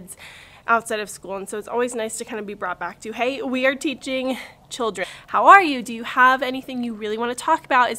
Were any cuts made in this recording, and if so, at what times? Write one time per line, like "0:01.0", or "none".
0:05.1